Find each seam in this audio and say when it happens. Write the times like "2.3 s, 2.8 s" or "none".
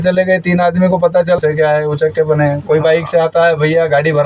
1.4 s